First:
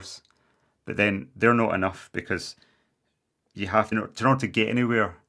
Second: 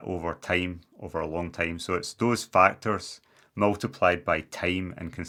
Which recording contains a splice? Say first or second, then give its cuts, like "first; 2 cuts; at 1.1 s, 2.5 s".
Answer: first; 1 cut; at 3.9 s